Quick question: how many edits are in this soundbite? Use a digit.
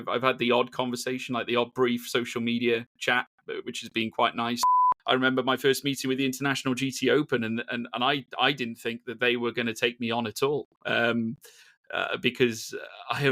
1